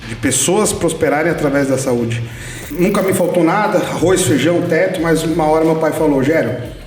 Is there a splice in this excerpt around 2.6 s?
yes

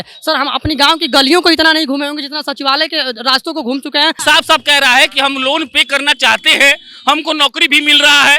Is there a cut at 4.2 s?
yes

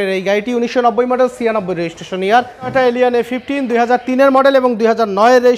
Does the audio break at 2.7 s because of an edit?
yes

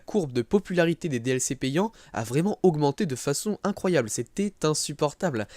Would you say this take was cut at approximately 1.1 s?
yes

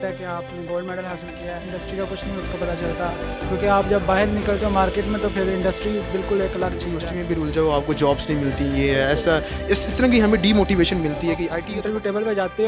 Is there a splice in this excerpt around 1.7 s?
yes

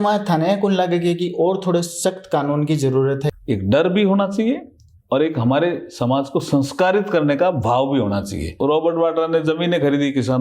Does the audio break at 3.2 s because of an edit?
yes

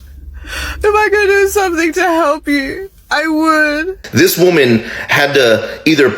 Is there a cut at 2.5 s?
no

